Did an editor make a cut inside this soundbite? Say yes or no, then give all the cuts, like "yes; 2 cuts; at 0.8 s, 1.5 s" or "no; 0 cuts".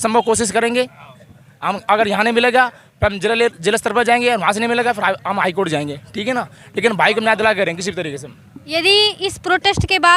no; 0 cuts